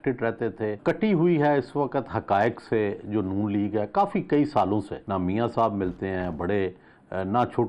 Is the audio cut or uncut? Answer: cut